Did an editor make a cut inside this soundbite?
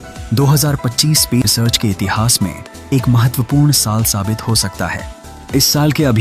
yes; 1 cut; at 2.7 s

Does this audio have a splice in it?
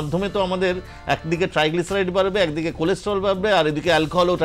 no; 0 cuts

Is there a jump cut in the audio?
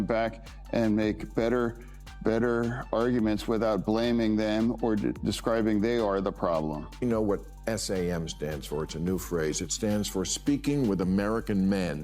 yes; 1 cut; at 6.8 s

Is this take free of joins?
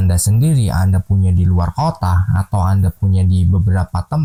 yes; 0 cuts

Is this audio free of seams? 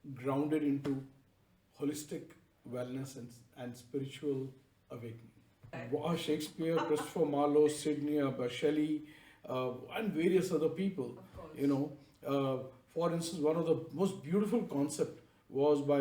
no; 1 cut; at 5.8 s

